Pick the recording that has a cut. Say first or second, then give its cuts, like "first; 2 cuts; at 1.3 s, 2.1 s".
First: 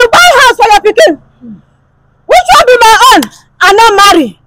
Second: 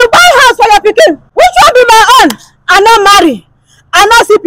second; 1 cut; at 1.2 s